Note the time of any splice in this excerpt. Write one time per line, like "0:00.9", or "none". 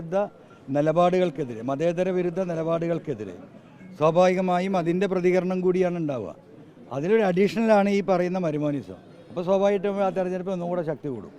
none